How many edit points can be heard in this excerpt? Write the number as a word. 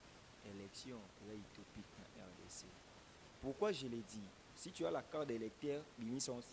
zero